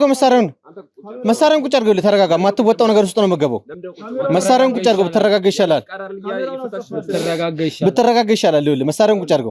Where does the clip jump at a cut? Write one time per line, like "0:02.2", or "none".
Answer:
none